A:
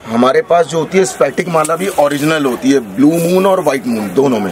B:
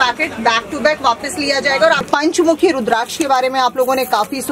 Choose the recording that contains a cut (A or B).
B